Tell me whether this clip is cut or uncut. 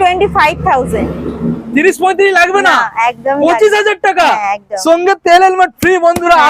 uncut